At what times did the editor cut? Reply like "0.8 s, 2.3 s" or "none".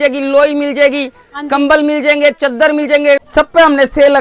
3.3 s